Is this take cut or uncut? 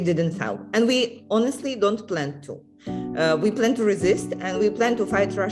uncut